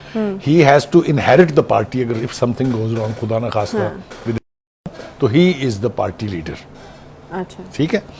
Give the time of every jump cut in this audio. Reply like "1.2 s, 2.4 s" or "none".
none